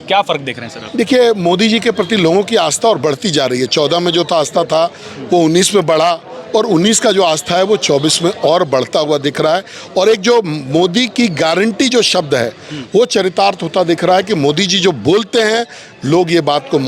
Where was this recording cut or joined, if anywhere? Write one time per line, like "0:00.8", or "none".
none